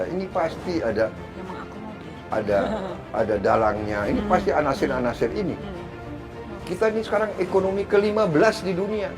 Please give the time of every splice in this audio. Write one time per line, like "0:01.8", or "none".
0:06.1